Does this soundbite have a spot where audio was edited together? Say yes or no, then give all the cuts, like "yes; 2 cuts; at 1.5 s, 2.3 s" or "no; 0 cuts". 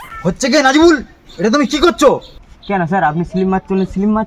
no; 0 cuts